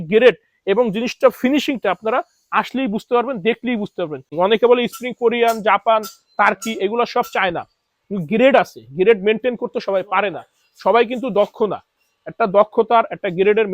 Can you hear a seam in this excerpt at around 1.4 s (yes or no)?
no